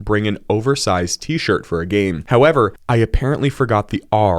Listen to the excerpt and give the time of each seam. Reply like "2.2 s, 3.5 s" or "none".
2.8 s